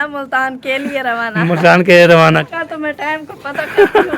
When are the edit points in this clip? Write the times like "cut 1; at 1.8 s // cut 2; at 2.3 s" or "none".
cut 1; at 2.4 s